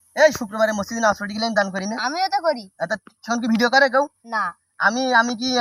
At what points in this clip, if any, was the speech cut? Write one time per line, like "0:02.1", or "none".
none